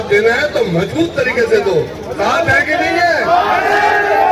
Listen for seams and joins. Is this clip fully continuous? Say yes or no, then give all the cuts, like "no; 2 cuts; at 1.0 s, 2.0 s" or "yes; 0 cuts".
yes; 0 cuts